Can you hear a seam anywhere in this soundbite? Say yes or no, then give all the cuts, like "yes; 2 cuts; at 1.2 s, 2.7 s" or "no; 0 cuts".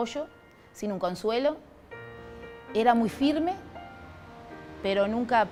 no; 0 cuts